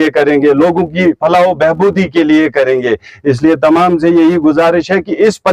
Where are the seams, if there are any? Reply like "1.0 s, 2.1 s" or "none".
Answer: none